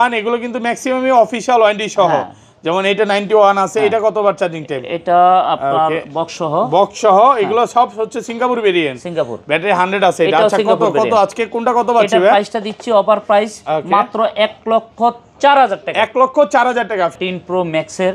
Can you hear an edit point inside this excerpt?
yes; 1 cut; at 17.2 s

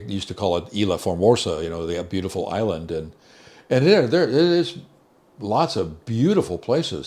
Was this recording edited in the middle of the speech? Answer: no; 0 cuts

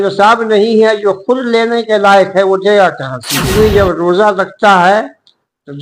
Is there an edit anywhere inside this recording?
yes; 1 cut; at 3.4 s

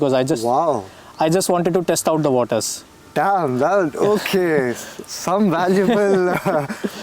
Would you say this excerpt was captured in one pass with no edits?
yes; 0 cuts

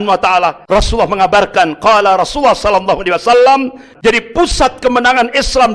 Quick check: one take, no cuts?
no; 1 cut; at 3.9 s

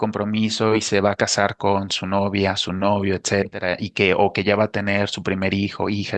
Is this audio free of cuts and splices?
yes; 0 cuts

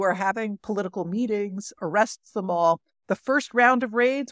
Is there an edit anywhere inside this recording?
yes; 1 cut; at 1.8 s

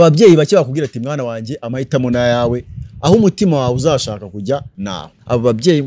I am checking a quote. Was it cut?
yes; 1 cut; at 4.8 s

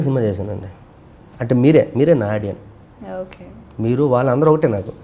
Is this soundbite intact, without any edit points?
yes; 0 cuts

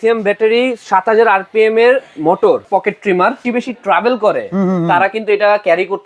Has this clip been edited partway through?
yes; 2 cuts; at 2.6 s, 3.5 s

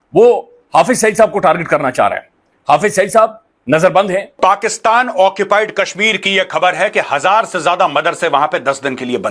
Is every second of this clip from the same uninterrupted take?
no; 1 cut; at 4.4 s

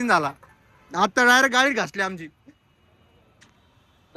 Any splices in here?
no; 0 cuts

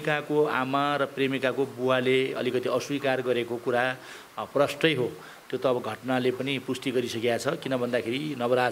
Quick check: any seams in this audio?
no; 0 cuts

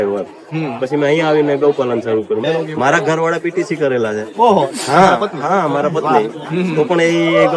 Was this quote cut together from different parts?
yes; 1 cut; at 2.4 s

